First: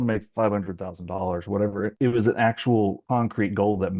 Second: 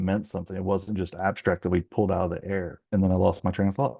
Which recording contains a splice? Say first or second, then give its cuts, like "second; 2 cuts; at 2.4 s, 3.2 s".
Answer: first; 2 cuts; at 1.9 s, 3.0 s